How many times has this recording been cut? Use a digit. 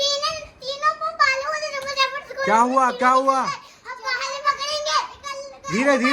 0